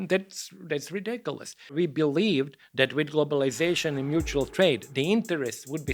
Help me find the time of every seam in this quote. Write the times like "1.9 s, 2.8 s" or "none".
1.8 s

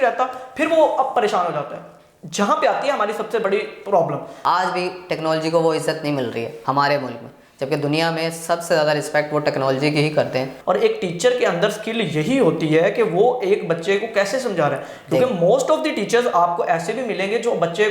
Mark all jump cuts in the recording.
4.3 s, 10.5 s

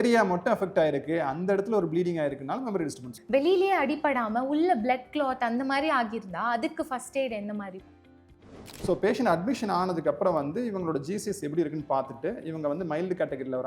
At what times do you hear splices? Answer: 3.1 s, 8.5 s

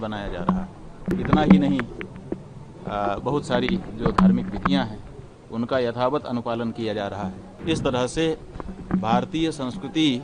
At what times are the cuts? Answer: 1.1 s, 7.5 s

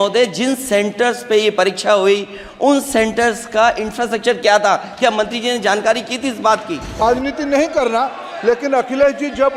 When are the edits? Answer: 7.0 s

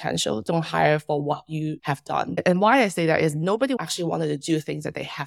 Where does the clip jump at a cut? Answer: none

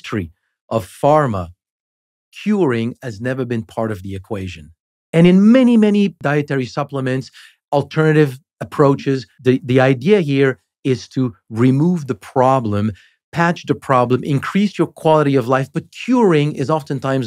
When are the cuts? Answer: 6.2 s, 9.3 s

